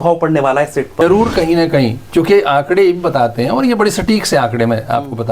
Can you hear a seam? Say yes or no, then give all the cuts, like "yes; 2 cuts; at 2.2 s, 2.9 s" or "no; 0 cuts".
yes; 1 cut; at 1.0 s